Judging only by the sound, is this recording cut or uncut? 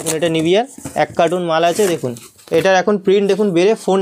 uncut